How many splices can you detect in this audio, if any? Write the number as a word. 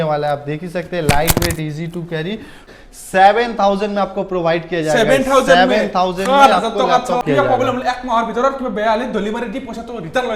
two